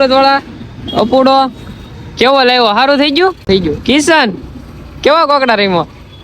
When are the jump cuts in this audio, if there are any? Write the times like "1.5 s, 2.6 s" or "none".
3.4 s